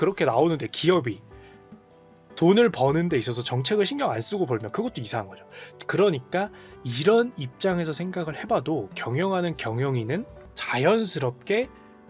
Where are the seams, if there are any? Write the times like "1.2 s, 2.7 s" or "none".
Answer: none